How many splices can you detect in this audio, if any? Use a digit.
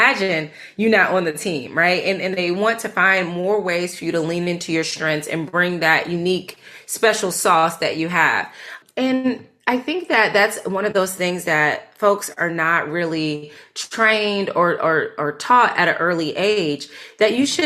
1